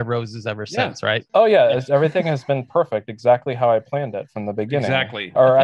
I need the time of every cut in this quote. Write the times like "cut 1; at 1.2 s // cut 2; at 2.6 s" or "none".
cut 1; at 1.2 s